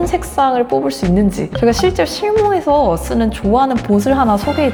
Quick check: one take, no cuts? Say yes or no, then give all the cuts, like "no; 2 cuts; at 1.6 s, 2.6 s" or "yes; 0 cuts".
yes; 0 cuts